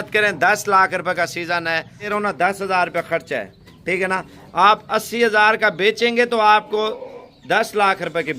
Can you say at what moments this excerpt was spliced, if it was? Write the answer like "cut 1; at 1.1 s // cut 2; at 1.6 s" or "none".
cut 1; at 2.1 s